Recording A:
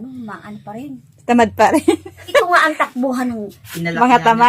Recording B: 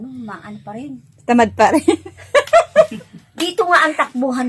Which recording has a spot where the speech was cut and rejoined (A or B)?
A